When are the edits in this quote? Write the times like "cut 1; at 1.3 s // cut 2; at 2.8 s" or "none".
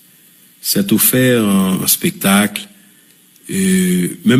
none